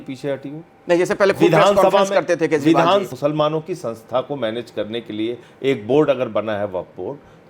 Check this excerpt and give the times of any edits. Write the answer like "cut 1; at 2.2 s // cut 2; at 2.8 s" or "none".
cut 1; at 3.1 s